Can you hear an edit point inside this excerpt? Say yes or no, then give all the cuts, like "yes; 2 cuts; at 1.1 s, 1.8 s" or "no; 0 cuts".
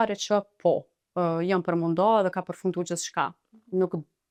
no; 0 cuts